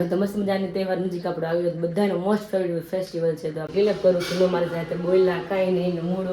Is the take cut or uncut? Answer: cut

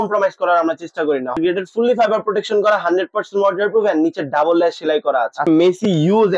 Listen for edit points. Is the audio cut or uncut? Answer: cut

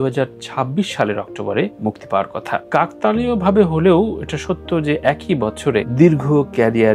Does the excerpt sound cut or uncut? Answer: uncut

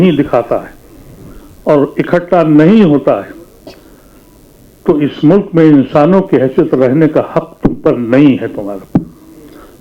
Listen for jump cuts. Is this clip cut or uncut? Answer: uncut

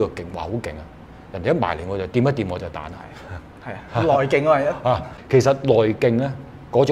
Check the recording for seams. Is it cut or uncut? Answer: uncut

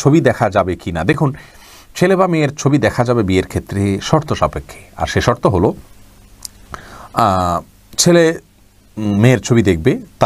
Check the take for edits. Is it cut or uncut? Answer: uncut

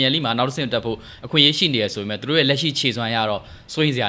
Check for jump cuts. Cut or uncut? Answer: uncut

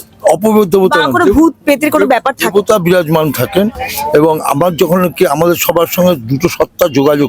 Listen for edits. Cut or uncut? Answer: uncut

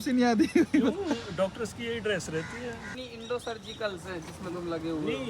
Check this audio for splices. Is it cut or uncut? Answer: uncut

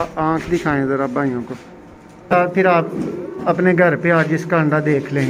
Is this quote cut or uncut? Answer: cut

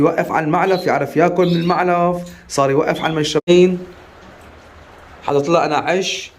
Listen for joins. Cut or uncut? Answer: cut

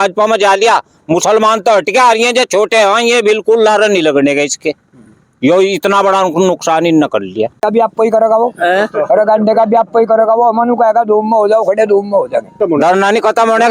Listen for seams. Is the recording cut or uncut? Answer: cut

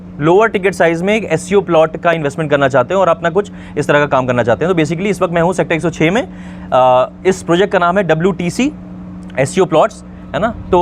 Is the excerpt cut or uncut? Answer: uncut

